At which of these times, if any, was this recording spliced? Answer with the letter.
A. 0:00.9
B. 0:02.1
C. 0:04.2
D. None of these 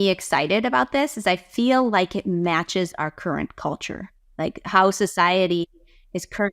D